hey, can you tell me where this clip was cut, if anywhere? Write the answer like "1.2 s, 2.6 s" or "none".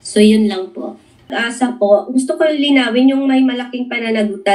1.3 s